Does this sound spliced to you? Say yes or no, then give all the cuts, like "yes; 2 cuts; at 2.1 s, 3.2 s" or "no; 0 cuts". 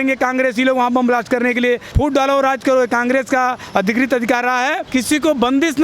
yes; 2 cuts; at 1.9 s, 4.8 s